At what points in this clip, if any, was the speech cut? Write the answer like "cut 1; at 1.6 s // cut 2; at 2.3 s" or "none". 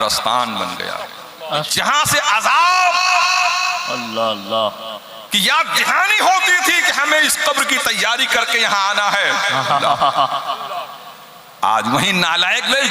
cut 1; at 1.7 s

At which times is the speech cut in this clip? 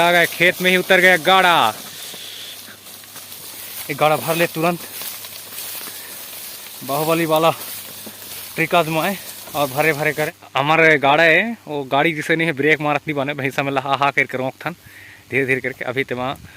cut 1; at 3.3 s // cut 2; at 10.4 s

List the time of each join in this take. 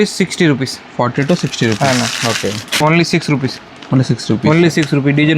cut 1; at 2.8 s

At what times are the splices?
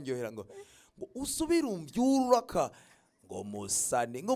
none

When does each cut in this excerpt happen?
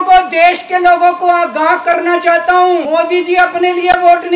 cut 1; at 2.9 s

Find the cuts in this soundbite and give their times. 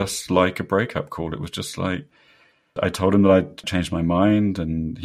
cut 1; at 2.7 s // cut 2; at 3.6 s

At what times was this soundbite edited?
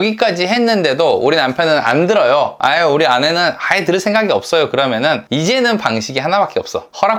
none

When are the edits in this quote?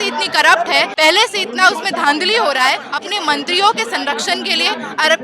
cut 1; at 0.9 s // cut 2; at 2.9 s

